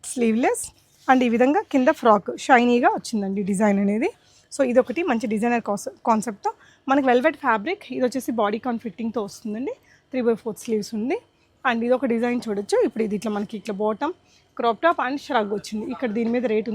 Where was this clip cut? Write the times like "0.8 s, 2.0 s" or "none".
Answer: none